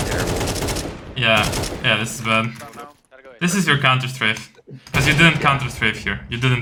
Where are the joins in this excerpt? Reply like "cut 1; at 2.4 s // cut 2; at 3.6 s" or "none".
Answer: none

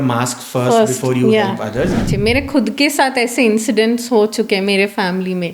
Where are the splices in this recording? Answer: cut 1; at 2.0 s

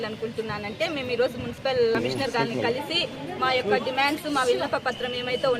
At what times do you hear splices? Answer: cut 1; at 2.0 s

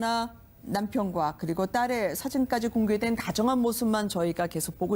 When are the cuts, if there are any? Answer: cut 1; at 3.4 s

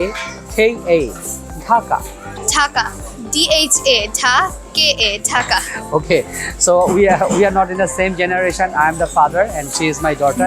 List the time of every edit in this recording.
cut 1; at 2.4 s

